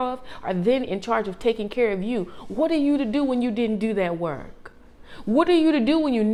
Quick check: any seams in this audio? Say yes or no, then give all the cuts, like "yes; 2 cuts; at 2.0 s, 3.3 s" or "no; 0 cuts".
no; 0 cuts